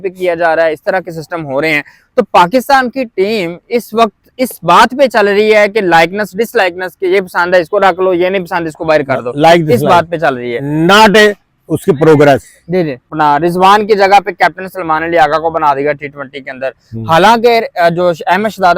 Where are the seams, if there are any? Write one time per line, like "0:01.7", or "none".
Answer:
0:13.1